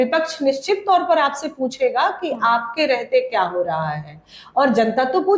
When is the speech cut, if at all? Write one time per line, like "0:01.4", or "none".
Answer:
none